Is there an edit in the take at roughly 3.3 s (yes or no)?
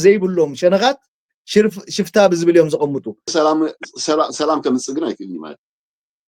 yes